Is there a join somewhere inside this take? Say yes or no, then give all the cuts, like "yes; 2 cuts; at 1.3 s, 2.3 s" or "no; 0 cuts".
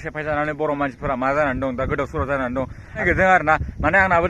yes; 1 cut; at 3.0 s